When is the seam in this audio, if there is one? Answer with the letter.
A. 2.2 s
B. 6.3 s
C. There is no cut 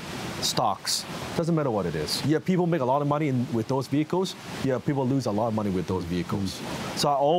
A